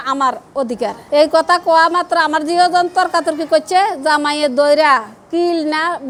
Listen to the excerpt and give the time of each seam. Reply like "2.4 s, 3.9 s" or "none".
none